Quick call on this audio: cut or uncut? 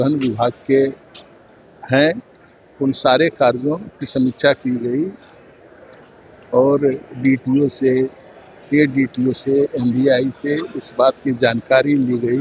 uncut